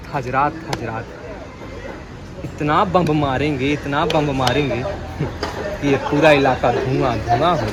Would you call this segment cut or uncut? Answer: uncut